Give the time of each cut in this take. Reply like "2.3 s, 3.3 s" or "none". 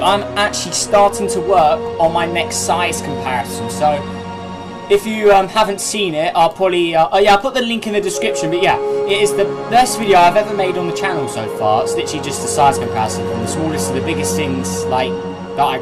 9.0 s